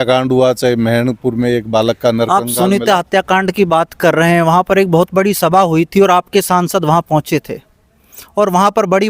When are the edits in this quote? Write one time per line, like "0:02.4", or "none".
none